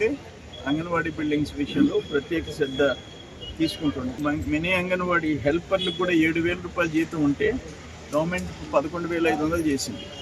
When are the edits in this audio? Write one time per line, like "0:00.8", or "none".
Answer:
0:04.2